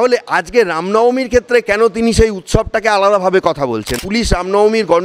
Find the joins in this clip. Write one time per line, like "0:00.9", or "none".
0:04.0